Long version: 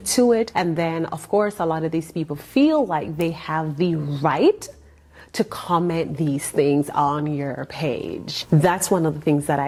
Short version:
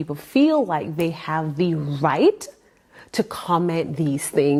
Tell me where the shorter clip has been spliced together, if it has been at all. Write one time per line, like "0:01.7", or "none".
none